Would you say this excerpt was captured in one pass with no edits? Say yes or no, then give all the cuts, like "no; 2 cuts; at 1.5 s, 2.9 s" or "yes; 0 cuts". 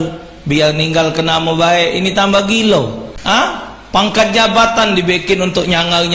no; 1 cut; at 3.1 s